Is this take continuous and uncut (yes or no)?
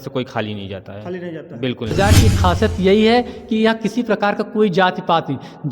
no